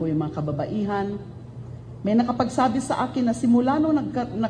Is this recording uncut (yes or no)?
no